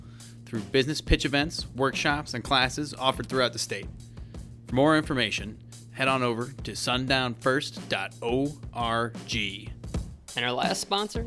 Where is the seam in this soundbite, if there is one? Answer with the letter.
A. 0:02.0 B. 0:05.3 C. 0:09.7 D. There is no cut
C